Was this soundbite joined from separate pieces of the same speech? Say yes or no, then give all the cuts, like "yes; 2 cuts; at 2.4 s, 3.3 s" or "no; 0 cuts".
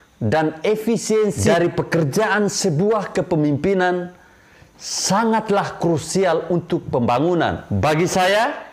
yes; 2 cuts; at 1.4 s, 7.6 s